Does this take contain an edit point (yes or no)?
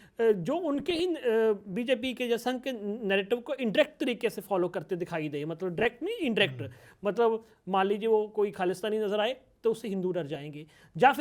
no